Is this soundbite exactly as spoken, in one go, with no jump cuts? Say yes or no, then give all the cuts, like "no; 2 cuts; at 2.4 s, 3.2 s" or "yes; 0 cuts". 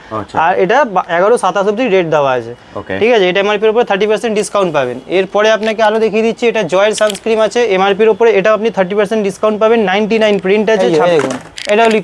no; 1 cut; at 10.8 s